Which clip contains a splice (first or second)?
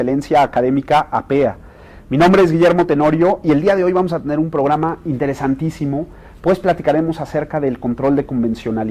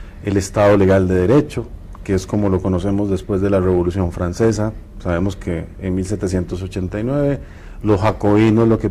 second